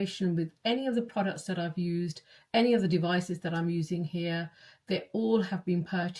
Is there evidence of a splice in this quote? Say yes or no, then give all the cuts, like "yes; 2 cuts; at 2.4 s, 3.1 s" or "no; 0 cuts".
no; 0 cuts